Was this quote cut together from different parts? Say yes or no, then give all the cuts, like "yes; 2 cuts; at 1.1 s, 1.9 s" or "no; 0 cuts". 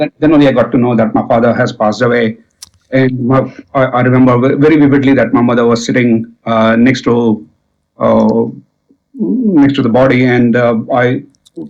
no; 0 cuts